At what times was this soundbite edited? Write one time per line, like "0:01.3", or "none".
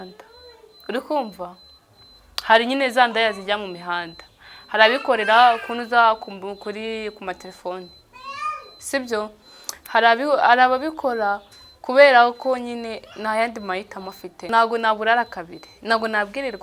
0:14.5